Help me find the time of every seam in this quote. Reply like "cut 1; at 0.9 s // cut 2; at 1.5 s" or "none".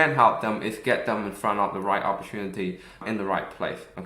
cut 1; at 3.0 s